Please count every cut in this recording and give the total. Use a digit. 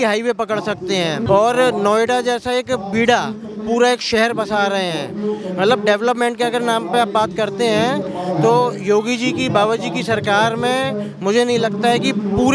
0